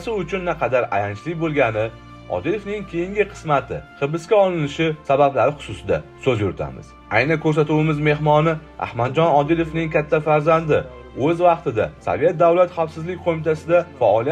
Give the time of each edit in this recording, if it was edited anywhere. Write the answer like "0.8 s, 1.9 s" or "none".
none